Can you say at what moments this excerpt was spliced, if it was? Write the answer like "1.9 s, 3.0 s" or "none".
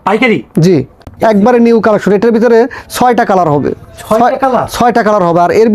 1.0 s